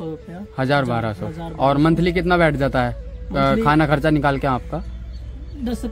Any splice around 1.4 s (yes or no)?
no